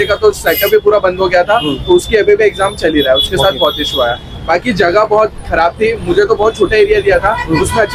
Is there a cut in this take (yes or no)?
no